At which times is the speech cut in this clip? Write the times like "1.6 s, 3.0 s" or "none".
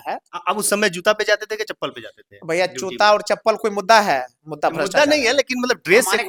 none